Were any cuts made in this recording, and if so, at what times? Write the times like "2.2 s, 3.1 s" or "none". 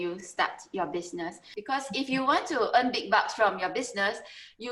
1.5 s